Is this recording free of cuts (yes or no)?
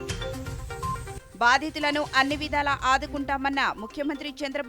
yes